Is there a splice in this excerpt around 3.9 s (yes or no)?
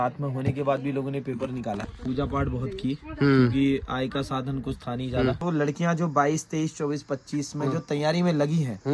no